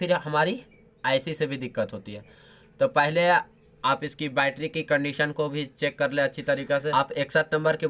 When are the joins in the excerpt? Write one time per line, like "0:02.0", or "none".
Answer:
0:06.9

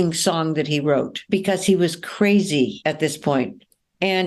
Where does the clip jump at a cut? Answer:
0:01.2
0:02.8

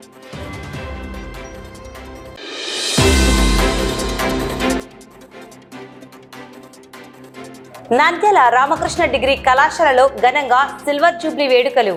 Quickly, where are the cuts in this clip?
none

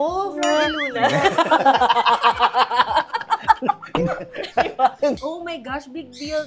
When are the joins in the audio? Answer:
0:05.2

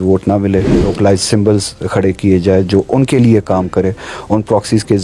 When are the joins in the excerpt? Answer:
0:00.9

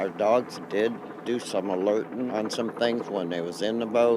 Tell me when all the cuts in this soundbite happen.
0:02.3

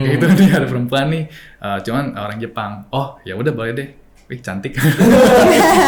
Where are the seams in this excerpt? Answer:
none

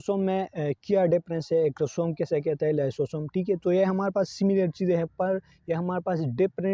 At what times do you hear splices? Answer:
none

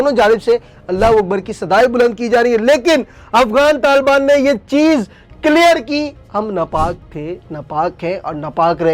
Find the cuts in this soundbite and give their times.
none

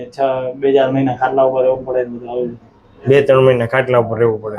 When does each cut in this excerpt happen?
none

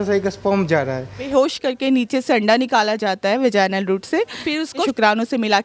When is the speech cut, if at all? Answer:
0:01.3
0:04.7

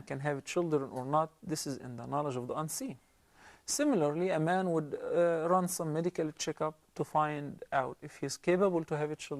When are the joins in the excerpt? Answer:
0:02.2

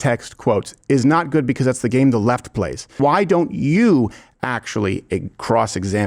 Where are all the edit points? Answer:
0:02.9

